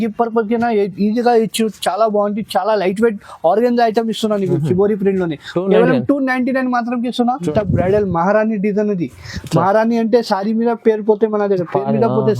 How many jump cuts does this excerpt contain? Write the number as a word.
one